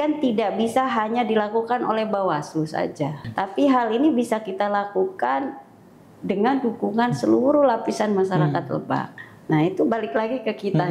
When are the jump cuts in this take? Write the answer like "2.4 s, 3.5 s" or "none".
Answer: 3.3 s, 9.2 s